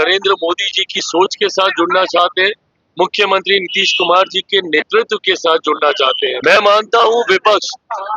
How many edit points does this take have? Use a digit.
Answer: 1